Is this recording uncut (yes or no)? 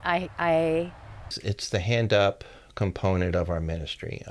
no